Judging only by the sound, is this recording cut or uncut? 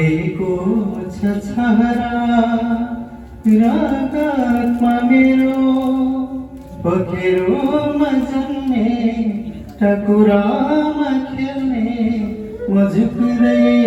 uncut